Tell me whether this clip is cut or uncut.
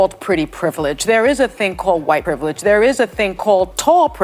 cut